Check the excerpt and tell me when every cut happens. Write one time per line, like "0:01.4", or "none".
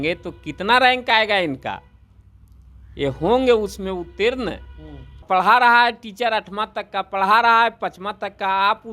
0:05.2